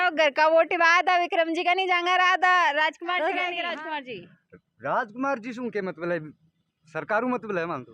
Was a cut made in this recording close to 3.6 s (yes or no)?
yes